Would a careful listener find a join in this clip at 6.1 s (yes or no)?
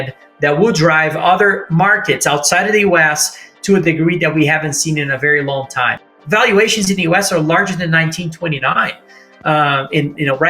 yes